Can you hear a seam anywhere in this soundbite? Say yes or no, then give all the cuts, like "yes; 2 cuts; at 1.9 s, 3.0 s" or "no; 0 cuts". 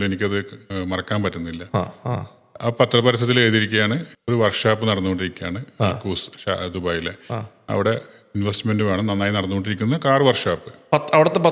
no; 0 cuts